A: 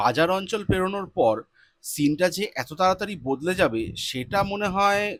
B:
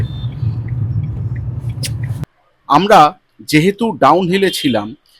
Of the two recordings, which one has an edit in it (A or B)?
B